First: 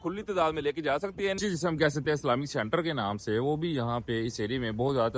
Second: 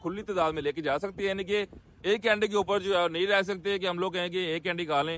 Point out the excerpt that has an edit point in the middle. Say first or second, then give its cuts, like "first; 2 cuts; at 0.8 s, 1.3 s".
first; 1 cut; at 1.4 s